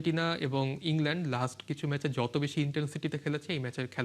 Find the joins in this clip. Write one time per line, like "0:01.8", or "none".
none